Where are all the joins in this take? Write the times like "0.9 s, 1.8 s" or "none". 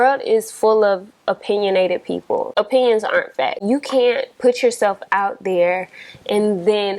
2.5 s, 3.6 s